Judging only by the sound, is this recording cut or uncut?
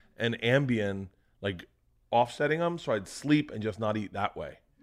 uncut